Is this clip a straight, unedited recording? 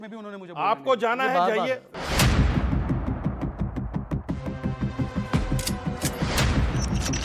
yes; 0 cuts

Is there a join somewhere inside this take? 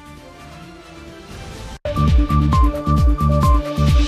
no; 0 cuts

